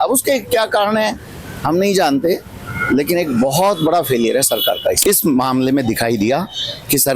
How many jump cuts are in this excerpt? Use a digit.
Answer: 1